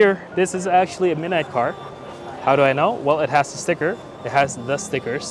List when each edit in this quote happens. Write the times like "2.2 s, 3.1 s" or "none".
none